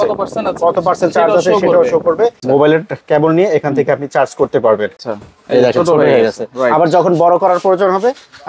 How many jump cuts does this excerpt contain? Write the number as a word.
two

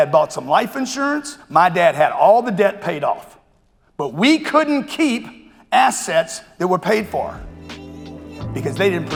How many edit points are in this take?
zero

